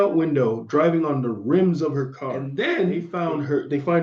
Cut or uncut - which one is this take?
cut